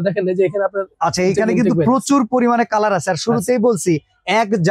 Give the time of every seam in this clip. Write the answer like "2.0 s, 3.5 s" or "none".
none